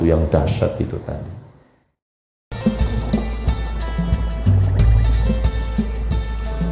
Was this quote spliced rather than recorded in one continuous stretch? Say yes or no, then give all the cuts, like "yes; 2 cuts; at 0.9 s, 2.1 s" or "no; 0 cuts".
yes; 1 cut; at 2.5 s